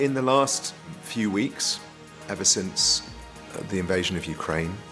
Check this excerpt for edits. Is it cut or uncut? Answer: cut